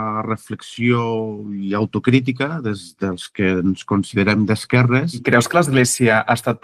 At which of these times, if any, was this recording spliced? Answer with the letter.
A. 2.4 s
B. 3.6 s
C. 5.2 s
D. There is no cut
C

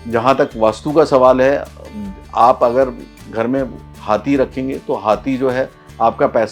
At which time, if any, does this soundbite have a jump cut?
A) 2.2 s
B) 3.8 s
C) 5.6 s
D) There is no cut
D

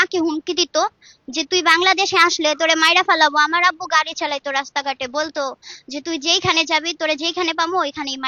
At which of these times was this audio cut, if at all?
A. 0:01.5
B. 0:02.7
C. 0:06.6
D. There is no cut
D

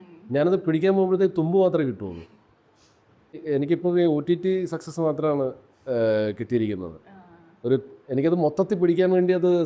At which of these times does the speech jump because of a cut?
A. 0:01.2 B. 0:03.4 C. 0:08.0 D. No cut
B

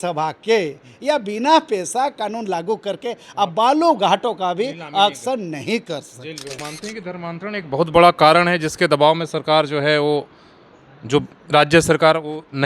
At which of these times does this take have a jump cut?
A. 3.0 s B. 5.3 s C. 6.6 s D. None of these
C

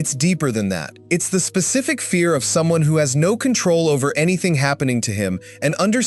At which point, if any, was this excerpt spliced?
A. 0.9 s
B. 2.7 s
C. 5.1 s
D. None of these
A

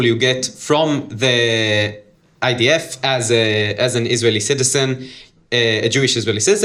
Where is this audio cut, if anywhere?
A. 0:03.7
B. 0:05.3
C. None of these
C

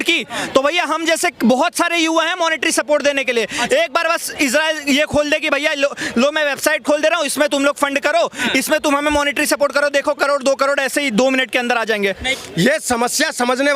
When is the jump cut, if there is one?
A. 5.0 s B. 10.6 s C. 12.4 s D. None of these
C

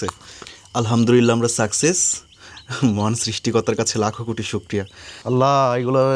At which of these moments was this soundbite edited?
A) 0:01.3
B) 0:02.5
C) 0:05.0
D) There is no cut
C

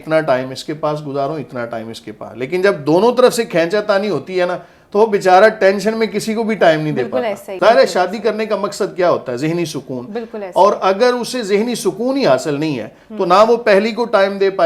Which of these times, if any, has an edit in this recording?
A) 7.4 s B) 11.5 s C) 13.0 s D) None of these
A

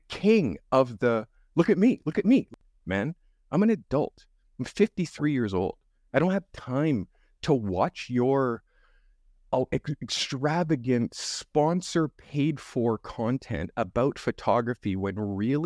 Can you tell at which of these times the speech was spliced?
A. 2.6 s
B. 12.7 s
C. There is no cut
A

